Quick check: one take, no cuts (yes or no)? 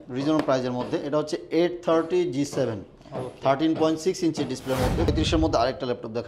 no